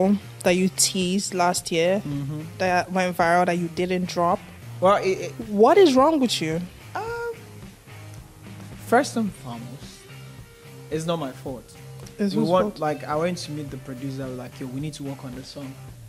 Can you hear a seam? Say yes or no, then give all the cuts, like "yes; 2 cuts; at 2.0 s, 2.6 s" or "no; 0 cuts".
no; 0 cuts